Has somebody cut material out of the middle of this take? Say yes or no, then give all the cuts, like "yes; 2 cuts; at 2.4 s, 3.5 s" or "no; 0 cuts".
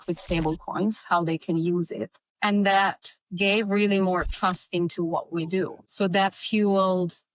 no; 0 cuts